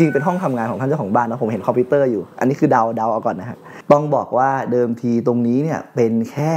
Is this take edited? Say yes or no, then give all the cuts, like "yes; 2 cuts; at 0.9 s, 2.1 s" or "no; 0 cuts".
yes; 1 cut; at 3.7 s